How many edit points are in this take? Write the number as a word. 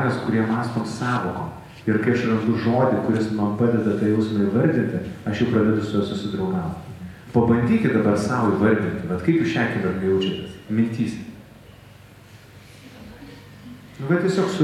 one